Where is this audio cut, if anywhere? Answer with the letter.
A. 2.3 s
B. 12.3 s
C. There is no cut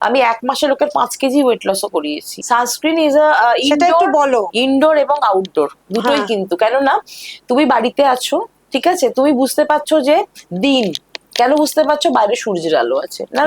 A